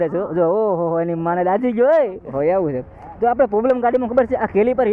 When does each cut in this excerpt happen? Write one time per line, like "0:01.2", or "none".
0:02.3